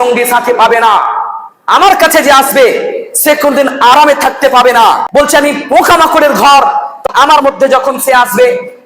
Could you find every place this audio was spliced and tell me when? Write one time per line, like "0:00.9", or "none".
0:05.0
0:07.0